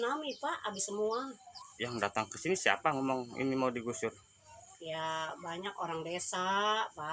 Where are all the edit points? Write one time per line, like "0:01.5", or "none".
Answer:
0:01.6